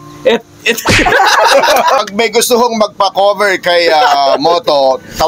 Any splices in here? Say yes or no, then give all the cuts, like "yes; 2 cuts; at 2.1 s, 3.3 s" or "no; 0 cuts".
yes; 1 cut; at 2.0 s